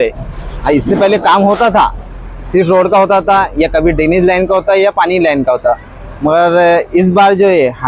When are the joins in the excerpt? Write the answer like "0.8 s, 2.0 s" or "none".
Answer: none

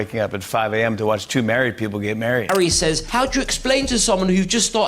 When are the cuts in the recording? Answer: 2.3 s

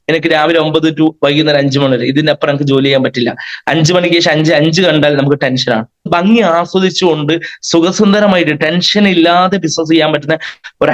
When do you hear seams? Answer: 6.1 s

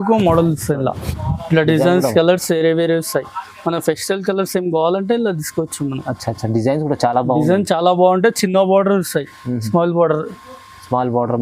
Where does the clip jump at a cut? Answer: none

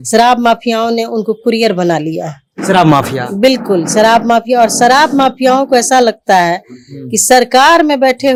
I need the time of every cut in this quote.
none

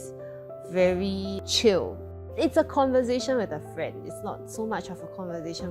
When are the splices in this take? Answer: 2.3 s

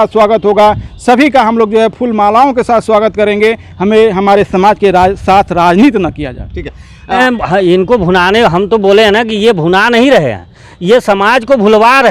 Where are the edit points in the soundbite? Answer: 7.2 s

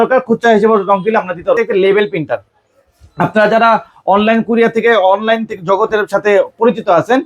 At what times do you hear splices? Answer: 1.6 s

